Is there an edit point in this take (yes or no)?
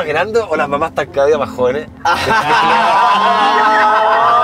no